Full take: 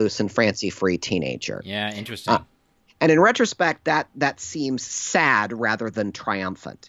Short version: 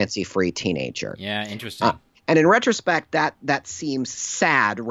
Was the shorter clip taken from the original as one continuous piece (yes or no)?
no